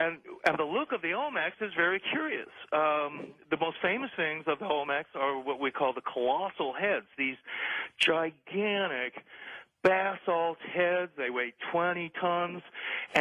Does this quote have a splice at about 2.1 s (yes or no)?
yes